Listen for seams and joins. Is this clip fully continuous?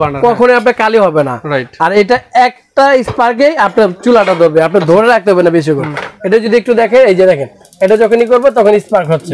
yes; 0 cuts

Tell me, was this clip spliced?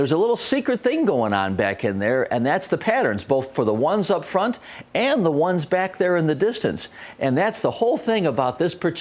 yes; 1 cut; at 7.9 s

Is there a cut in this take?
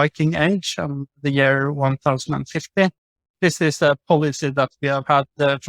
yes; 1 cut; at 3.3 s

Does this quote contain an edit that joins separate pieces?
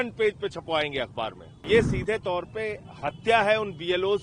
yes; 1 cut; at 1.7 s

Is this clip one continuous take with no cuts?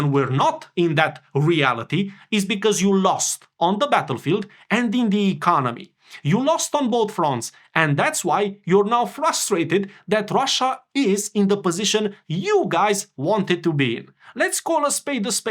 yes; 0 cuts

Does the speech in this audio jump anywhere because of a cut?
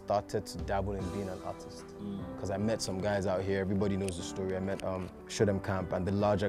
no; 0 cuts

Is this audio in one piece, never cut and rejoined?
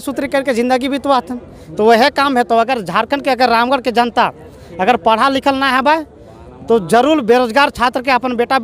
yes; 0 cuts

